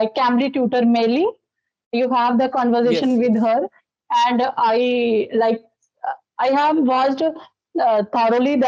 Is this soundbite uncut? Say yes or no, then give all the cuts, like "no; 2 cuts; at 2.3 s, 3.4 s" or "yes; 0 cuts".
yes; 0 cuts